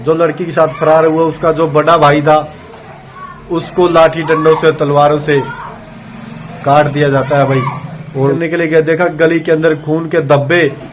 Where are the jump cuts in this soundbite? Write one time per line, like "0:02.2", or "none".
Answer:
0:08.4